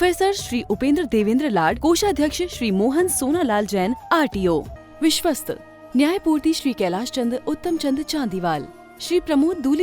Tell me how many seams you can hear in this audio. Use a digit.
1